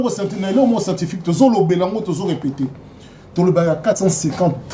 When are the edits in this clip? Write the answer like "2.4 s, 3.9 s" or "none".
none